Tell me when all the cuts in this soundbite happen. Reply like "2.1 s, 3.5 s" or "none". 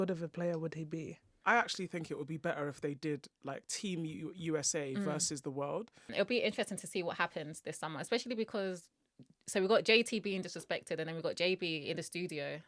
1.3 s, 6.1 s